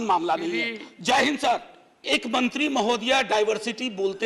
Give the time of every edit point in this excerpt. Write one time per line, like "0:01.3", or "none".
0:02.0

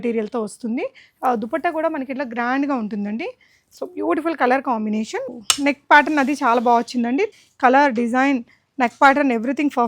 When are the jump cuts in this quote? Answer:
0:05.3
0:07.3

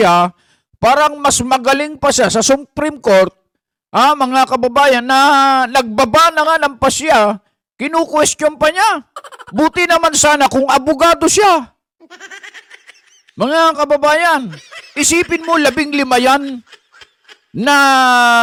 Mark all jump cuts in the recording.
none

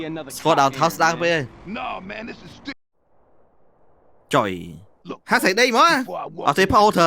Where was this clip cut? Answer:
0:02.8

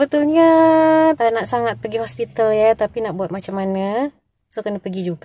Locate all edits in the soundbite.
0:01.2

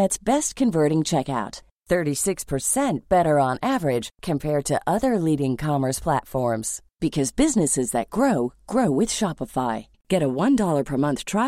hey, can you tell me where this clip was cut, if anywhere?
none

